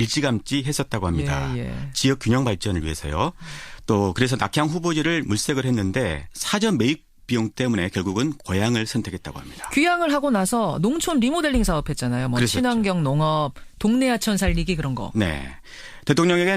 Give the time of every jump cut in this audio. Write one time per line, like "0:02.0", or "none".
0:13.6